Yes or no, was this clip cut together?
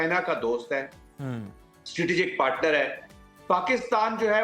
no